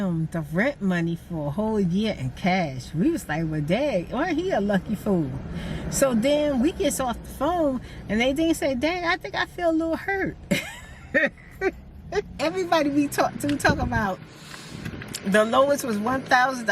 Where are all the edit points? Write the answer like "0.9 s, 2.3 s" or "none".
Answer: 12.3 s